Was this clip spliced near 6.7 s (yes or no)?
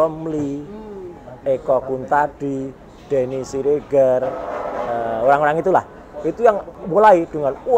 yes